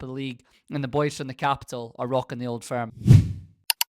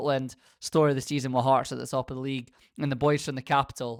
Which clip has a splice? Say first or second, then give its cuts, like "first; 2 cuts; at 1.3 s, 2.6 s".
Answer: first; 1 cut; at 2.9 s